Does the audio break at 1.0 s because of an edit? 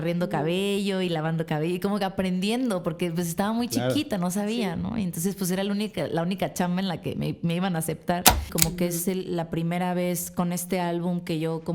no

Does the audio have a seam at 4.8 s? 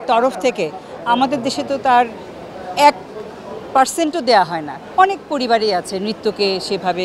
yes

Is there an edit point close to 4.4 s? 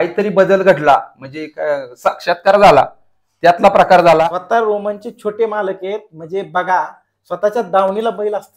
yes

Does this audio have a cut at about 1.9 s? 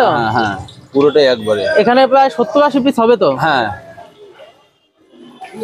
no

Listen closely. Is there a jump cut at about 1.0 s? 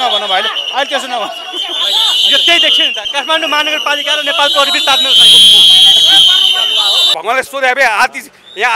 no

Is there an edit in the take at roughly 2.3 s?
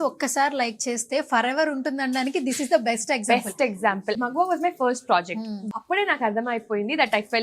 no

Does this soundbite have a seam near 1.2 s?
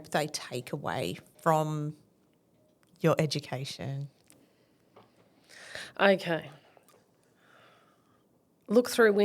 yes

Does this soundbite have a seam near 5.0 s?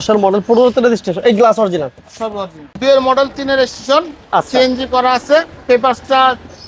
no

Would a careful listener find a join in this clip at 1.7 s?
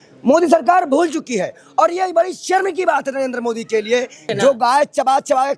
no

